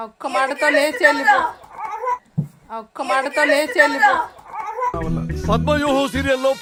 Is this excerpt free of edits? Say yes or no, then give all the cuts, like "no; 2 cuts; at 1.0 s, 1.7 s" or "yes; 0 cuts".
yes; 0 cuts